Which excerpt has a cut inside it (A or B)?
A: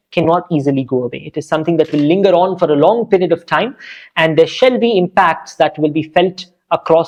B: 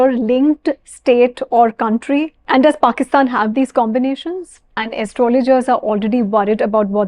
B